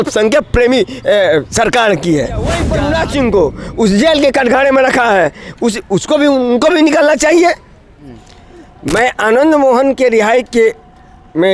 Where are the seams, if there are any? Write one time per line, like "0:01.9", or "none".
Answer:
0:02.6
0:07.7